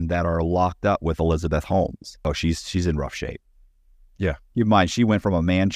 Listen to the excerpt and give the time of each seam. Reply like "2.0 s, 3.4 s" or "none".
2.2 s

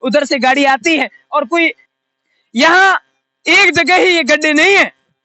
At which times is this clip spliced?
1.9 s

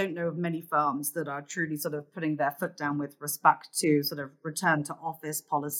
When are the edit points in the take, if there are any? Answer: none

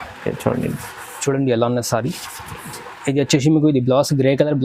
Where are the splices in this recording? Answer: none

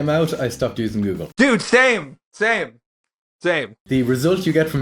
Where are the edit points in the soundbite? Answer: 3.8 s

